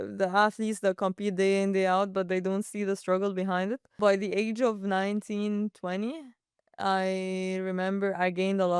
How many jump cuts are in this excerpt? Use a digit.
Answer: 1